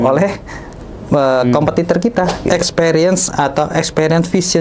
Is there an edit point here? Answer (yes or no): yes